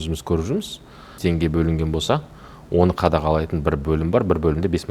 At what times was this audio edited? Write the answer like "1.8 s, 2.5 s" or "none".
1.2 s